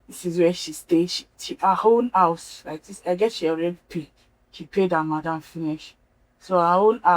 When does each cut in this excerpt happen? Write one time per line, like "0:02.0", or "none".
none